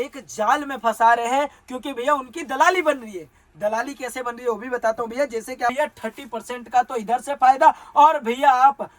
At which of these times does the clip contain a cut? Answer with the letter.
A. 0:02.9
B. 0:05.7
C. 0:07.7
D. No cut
B